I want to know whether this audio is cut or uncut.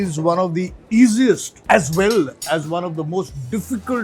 cut